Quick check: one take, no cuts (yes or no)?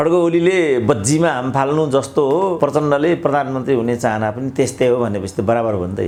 yes